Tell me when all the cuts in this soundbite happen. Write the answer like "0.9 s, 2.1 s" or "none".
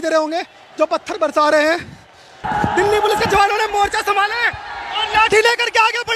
2.4 s